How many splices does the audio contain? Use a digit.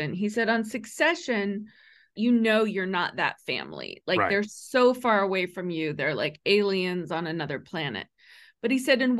1